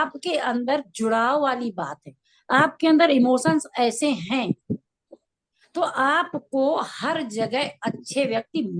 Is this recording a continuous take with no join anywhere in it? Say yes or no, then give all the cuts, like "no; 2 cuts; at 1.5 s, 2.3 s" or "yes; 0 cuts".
yes; 0 cuts